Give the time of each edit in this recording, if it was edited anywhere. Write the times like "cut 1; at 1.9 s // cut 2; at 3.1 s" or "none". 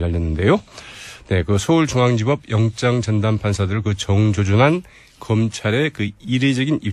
cut 1; at 5.9 s